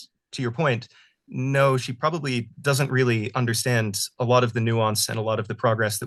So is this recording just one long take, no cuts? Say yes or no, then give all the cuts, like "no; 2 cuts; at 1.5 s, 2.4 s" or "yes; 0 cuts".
yes; 0 cuts